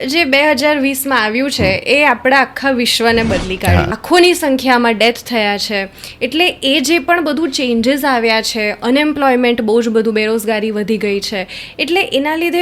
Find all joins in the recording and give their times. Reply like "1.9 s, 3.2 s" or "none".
4.0 s